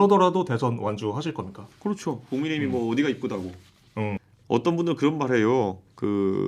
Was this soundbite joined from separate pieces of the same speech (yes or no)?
yes